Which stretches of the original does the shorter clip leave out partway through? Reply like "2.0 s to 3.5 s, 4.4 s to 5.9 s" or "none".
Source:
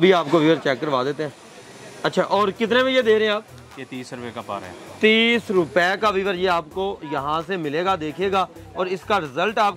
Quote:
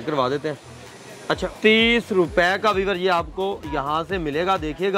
2.1 s to 4.8 s